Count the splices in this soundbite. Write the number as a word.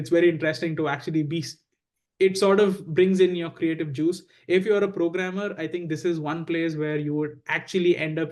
zero